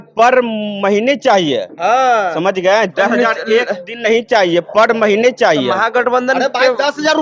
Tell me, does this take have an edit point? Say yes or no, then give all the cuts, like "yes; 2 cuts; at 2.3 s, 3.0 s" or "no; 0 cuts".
no; 0 cuts